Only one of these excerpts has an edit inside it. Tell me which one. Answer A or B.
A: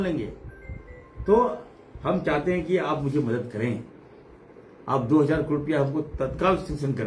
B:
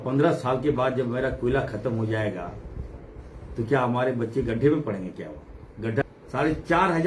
B